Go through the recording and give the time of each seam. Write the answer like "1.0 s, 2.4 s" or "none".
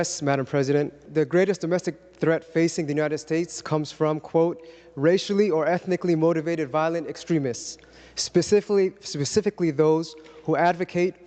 1.0 s